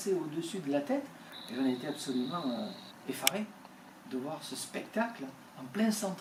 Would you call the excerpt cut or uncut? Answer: uncut